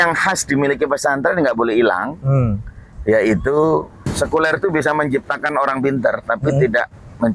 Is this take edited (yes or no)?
yes